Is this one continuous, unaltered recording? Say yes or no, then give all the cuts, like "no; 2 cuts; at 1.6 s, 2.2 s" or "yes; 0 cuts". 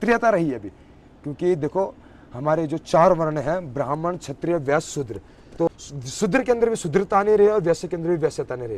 no; 1 cut; at 5.7 s